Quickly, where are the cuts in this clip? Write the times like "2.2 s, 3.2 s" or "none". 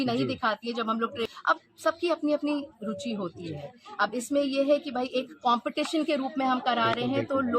1.3 s